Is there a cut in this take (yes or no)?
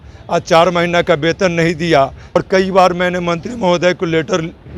yes